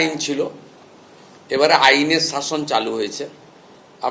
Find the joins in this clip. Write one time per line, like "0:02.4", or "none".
none